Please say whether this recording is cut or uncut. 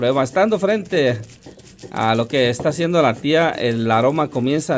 uncut